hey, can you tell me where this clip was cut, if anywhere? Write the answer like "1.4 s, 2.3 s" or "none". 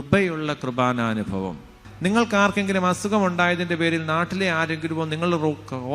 1.9 s